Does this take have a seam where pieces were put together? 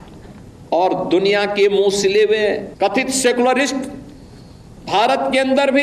yes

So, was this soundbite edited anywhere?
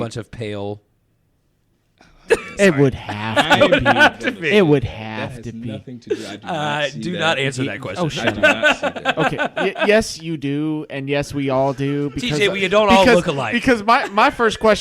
no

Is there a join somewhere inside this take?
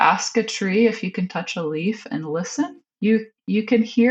no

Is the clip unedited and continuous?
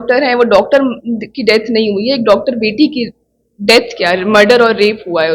yes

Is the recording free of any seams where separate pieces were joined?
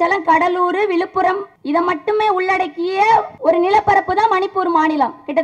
no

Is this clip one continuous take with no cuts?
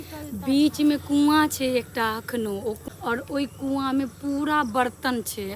no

